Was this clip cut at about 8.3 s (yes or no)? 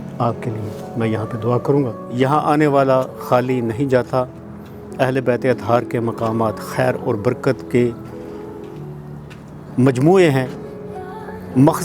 no